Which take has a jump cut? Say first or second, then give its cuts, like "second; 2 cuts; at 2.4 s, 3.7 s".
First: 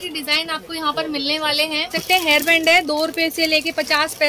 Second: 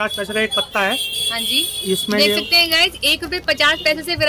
first; 1 cut; at 2.0 s